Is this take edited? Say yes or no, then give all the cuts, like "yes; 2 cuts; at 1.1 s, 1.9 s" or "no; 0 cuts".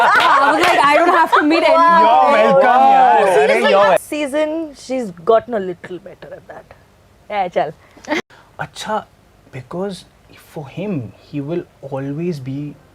yes; 2 cuts; at 4.0 s, 8.1 s